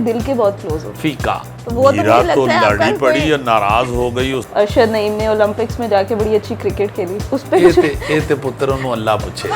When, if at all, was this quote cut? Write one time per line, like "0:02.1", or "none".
0:01.5
0:04.4